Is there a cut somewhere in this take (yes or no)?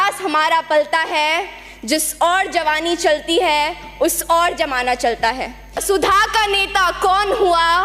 yes